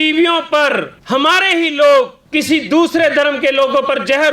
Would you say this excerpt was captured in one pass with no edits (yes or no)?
no